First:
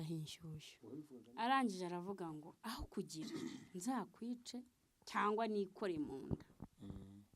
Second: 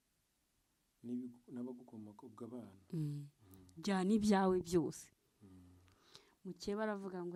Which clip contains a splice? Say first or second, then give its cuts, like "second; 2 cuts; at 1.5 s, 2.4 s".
first; 1 cut; at 1.2 s